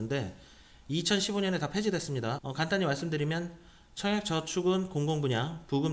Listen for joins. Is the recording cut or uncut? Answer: uncut